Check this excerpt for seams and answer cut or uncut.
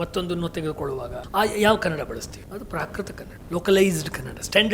cut